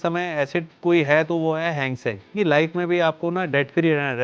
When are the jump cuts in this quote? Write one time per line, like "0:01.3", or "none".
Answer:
0:02.3